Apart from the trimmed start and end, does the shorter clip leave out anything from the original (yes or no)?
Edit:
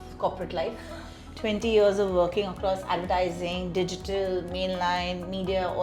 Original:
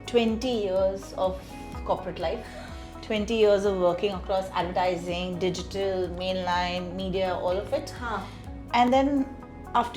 no